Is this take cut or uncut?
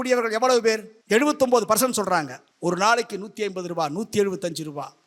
cut